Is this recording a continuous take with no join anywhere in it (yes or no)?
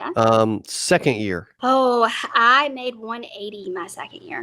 no